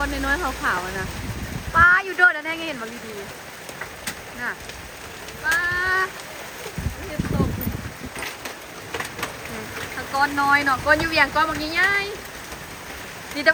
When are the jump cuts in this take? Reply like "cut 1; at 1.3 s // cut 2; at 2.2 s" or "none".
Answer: none